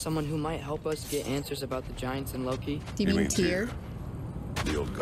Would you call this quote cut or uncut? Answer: uncut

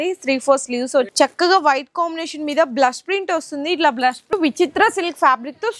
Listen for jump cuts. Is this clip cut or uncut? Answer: cut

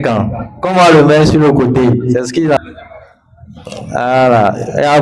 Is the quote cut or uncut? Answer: cut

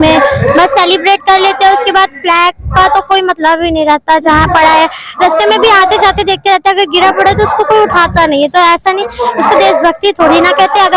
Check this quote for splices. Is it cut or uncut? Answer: uncut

